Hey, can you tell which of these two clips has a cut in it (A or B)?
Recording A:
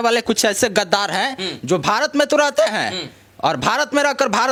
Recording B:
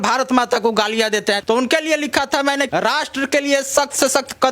B